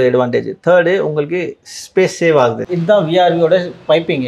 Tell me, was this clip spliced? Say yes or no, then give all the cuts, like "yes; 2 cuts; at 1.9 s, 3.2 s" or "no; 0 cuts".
yes; 1 cut; at 2.7 s